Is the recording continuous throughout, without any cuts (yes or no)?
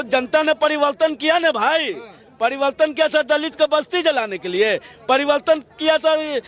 yes